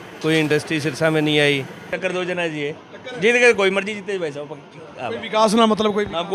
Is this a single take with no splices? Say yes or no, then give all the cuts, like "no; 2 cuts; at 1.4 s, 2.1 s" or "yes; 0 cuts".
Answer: no; 1 cut; at 1.9 s